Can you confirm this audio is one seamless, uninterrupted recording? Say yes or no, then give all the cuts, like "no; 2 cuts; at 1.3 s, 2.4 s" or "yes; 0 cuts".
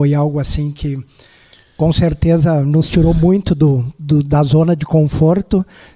yes; 0 cuts